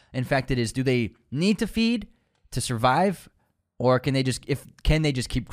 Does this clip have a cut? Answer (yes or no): no